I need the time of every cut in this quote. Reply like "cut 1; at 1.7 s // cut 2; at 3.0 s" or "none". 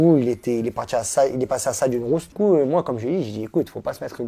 cut 1; at 2.3 s